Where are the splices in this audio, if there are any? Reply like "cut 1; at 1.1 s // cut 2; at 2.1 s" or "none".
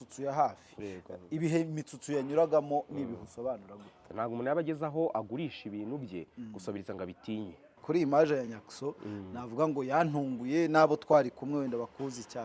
cut 1; at 4.0 s // cut 2; at 7.7 s

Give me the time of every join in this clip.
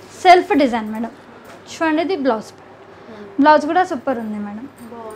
none

